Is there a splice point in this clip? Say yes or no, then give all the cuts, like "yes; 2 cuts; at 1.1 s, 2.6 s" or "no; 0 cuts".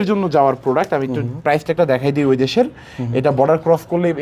no; 0 cuts